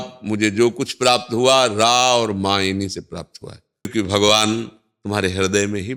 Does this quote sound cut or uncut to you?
cut